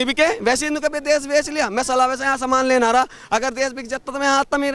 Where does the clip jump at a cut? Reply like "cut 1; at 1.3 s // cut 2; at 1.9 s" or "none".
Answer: none